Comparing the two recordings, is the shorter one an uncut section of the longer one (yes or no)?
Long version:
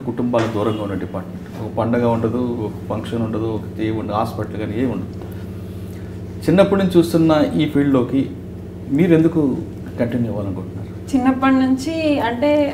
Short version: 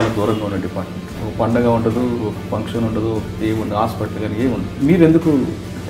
no